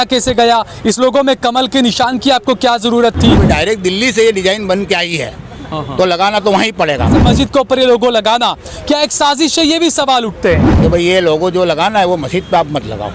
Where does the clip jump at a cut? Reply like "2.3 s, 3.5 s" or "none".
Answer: 3.4 s, 7.2 s, 10.7 s